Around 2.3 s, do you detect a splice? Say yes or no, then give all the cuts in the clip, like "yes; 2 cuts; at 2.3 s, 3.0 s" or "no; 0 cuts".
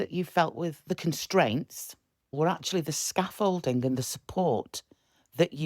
yes; 1 cut; at 2.3 s